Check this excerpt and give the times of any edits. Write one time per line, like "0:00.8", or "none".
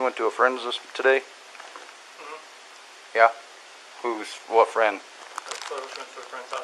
none